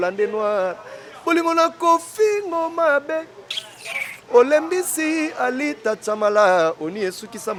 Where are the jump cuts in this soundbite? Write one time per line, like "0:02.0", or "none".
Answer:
none